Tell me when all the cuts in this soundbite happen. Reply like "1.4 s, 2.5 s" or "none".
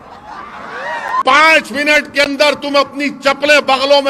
1.2 s